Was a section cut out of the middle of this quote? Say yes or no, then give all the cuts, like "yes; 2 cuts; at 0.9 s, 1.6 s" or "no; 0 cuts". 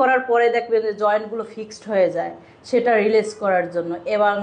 no; 0 cuts